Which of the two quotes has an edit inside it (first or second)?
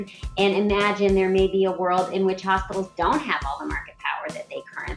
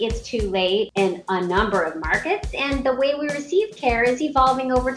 second